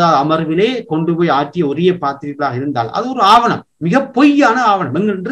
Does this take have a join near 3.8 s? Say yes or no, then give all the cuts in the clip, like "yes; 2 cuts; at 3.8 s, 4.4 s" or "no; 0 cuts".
no; 0 cuts